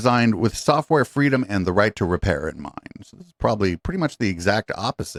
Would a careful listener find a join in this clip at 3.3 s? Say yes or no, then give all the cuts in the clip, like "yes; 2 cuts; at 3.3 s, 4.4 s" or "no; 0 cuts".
no; 0 cuts